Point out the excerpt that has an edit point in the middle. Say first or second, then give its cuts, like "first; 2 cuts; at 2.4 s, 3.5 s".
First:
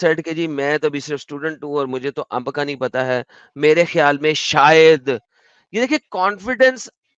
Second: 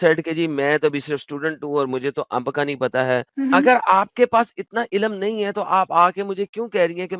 second; 1 cut; at 3.3 s